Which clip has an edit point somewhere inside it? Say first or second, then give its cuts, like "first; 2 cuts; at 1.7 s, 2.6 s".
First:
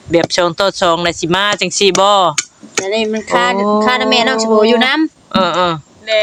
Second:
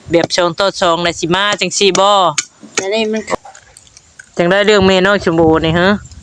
second; 1 cut; at 3.3 s